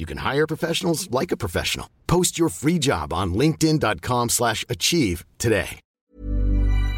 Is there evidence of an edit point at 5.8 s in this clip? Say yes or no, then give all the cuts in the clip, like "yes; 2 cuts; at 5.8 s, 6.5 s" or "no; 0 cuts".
yes; 1 cut; at 5.8 s